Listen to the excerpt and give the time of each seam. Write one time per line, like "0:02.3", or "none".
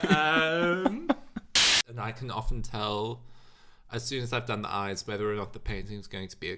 0:01.8